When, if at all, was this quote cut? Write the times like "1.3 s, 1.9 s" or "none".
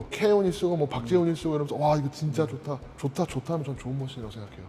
none